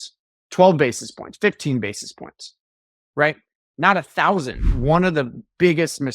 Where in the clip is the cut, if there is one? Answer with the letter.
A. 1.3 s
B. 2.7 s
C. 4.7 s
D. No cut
C